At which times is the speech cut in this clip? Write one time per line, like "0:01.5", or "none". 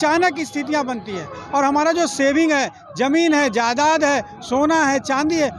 none